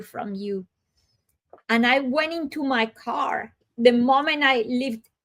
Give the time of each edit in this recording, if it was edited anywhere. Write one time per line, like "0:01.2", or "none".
0:03.7